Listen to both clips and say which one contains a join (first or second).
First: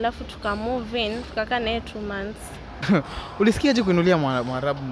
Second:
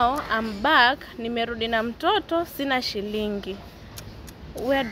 first